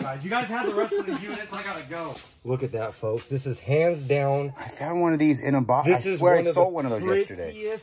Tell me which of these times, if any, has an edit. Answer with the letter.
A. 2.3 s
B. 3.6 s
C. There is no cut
A